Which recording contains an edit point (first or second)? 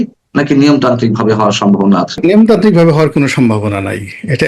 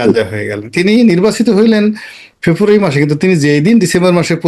first